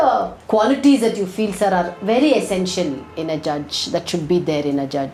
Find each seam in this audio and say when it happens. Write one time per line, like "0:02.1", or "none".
none